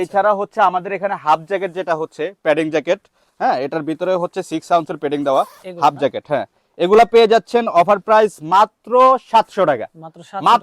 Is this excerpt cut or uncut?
uncut